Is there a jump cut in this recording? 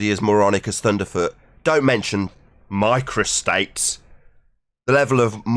no; 0 cuts

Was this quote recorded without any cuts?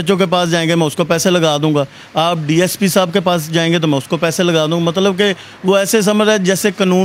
yes; 0 cuts

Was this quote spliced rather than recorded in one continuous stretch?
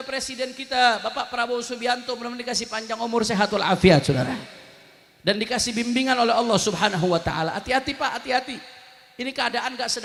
no; 0 cuts

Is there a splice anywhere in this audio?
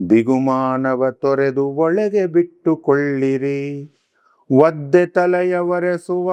no; 0 cuts

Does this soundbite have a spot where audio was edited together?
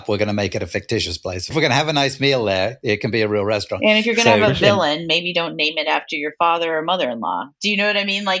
yes; 1 cut; at 1.5 s

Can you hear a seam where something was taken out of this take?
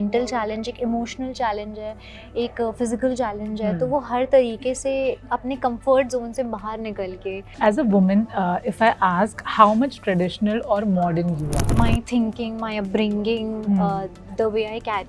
yes; 2 cuts; at 7.5 s, 11.6 s

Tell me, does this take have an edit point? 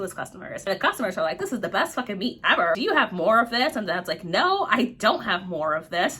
no; 0 cuts

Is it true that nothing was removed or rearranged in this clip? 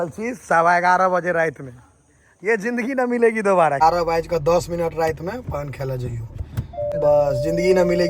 no; 2 cuts; at 3.8 s, 6.9 s

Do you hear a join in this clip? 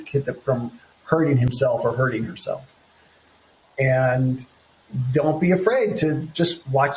no; 0 cuts

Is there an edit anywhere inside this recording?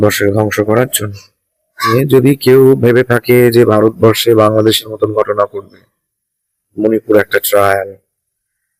yes; 1 cut; at 1.9 s

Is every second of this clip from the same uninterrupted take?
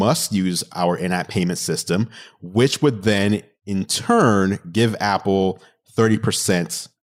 yes; 0 cuts

